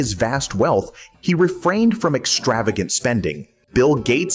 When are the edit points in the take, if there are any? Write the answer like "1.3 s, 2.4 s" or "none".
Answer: 1.1 s